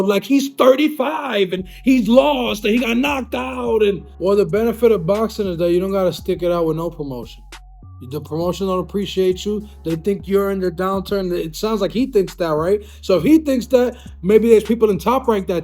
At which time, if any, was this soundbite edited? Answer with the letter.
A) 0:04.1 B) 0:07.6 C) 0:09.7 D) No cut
A